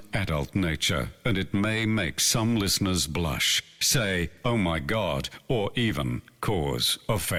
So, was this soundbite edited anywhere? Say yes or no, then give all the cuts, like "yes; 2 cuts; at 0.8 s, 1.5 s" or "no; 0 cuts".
no; 0 cuts